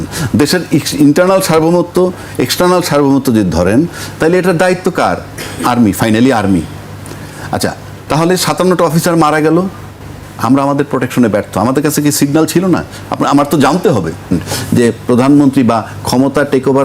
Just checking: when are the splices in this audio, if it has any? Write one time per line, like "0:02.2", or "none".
0:14.3